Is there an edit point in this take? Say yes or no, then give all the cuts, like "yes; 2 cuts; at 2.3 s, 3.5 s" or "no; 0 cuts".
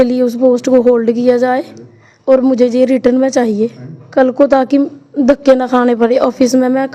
no; 0 cuts